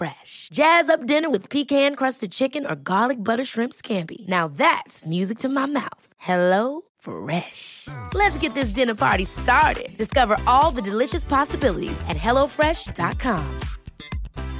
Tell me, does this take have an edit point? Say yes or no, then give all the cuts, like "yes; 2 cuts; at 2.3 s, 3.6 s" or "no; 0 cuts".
no; 0 cuts